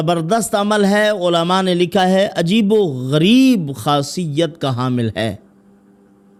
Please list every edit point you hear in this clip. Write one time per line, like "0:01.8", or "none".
none